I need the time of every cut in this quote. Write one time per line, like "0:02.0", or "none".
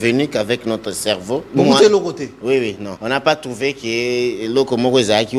0:01.5
0:02.9